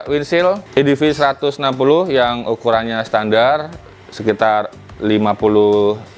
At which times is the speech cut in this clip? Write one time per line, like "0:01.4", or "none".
none